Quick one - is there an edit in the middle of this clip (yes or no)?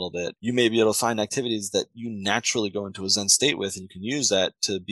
yes